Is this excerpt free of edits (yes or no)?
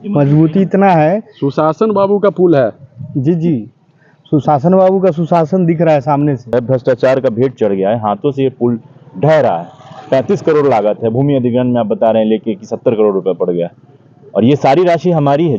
no